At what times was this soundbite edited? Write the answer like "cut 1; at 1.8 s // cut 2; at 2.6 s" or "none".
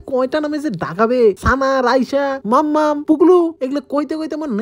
cut 1; at 1.4 s // cut 2; at 2.4 s // cut 3; at 3.6 s